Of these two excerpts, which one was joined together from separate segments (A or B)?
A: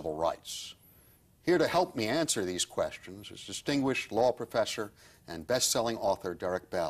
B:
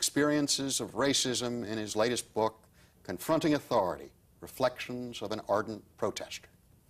B